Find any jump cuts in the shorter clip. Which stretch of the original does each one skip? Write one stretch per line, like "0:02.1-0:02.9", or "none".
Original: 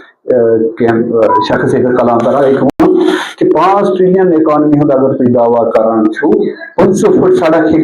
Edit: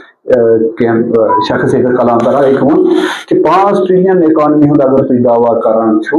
0:02.7-0:02.8